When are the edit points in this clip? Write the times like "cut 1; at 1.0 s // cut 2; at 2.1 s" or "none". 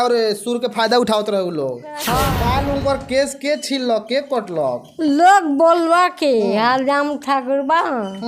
cut 1; at 2.1 s

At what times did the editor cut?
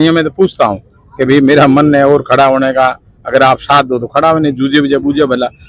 none

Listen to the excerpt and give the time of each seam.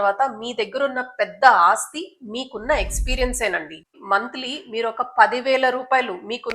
cut 1; at 3.9 s

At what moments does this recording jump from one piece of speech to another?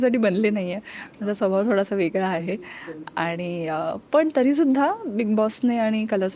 none

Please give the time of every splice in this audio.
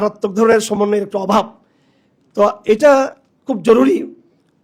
none

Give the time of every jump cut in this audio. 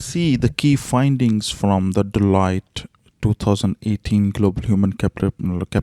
none

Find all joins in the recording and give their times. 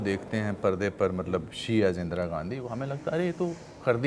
none

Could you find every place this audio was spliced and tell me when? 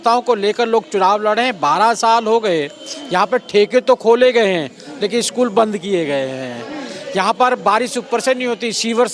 none

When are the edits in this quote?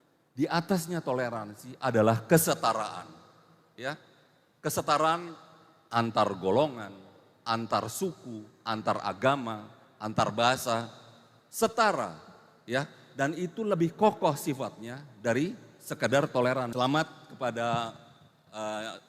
cut 1; at 16.7 s

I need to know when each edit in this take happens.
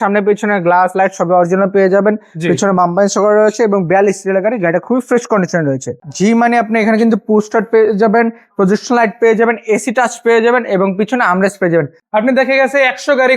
cut 1; at 6.0 s // cut 2; at 12.0 s

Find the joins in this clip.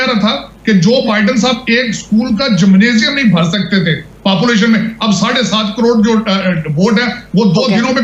none

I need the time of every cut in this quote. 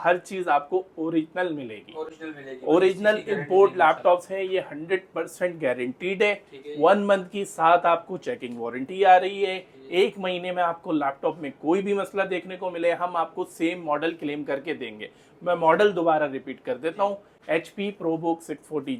none

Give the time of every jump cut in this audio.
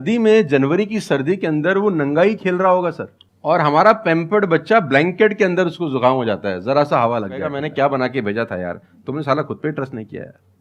cut 1; at 7.6 s

